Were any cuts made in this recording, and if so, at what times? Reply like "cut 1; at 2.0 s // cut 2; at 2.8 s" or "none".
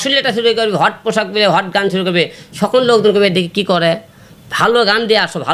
none